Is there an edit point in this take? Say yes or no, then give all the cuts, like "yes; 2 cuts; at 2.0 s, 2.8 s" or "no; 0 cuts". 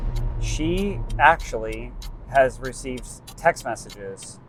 no; 0 cuts